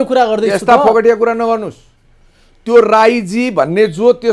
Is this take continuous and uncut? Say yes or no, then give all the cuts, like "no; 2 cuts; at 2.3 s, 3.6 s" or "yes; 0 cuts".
yes; 0 cuts